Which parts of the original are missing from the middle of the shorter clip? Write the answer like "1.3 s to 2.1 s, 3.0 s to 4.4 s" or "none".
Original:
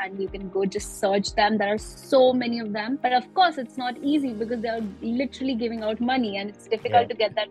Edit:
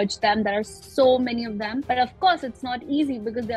none